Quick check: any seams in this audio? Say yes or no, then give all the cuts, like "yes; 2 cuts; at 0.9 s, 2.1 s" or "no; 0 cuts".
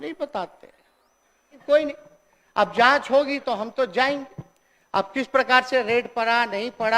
yes; 1 cut; at 1.6 s